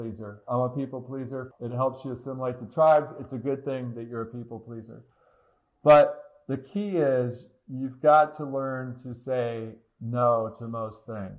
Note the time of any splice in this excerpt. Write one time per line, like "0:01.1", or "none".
0:01.4